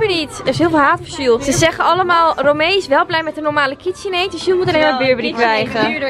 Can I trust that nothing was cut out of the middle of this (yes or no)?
yes